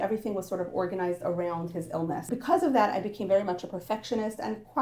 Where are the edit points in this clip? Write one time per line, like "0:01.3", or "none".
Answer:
0:02.2